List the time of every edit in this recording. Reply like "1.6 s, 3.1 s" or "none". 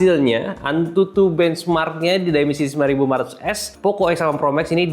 3.7 s